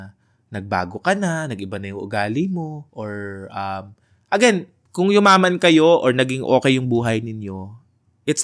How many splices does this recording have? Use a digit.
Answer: 2